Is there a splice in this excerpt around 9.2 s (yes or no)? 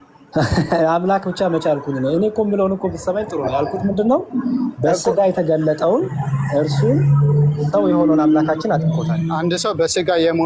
yes